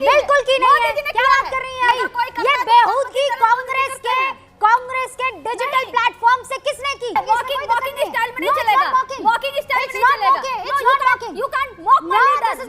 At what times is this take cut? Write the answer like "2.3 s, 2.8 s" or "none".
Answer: 1.9 s, 7.1 s